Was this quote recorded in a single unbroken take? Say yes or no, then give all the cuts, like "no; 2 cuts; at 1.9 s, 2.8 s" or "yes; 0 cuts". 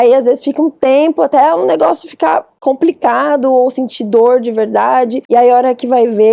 yes; 0 cuts